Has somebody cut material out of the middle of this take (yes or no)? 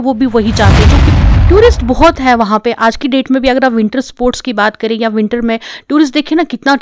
yes